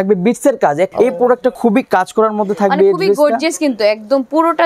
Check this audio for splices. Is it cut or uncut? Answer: cut